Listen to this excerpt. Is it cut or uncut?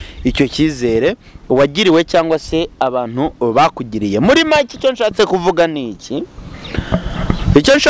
uncut